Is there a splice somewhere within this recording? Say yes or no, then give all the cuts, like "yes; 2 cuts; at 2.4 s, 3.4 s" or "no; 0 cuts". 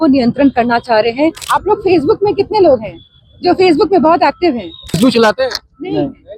yes; 2 cuts; at 1.4 s, 5.0 s